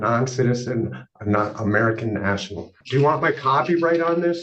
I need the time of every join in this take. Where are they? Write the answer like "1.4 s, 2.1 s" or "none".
2.8 s